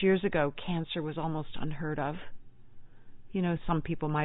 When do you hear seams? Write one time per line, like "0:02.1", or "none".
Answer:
none